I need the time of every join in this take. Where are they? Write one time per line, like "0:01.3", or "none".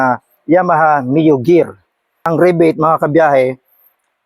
0:02.2